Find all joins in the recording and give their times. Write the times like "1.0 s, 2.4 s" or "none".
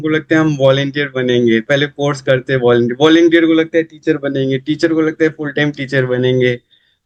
none